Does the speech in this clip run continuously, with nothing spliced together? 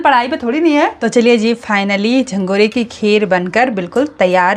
no; 1 cut; at 1.0 s

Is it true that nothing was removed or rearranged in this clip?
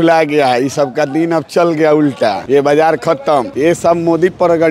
no; 2 cuts; at 2.4 s, 3.5 s

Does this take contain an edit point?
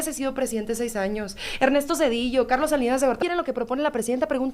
yes; 1 cut; at 3.2 s

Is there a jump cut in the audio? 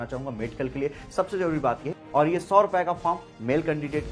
yes; 1 cut; at 1.9 s

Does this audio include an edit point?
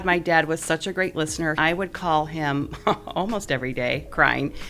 yes; 1 cut; at 1.6 s

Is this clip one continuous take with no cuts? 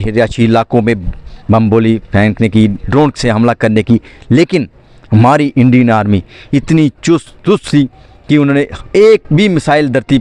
yes; 0 cuts

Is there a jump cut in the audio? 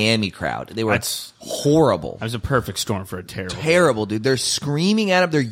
no; 0 cuts

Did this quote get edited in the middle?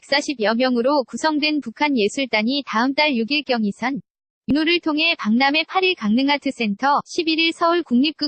yes; 1 cut; at 4.5 s

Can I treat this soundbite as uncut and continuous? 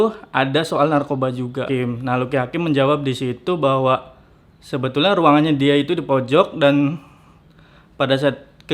no; 1 cut; at 1.7 s

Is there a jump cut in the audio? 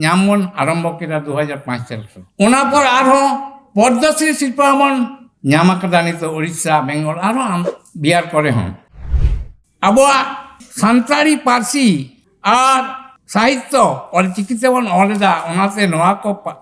yes; 1 cut; at 9.2 s

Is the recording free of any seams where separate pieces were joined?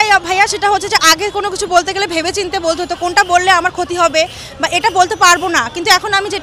yes; 0 cuts

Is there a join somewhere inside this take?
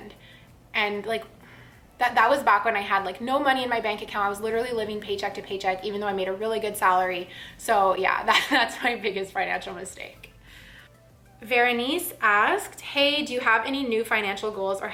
no; 0 cuts

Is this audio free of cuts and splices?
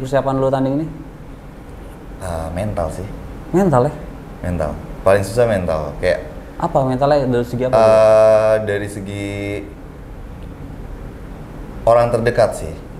yes; 0 cuts

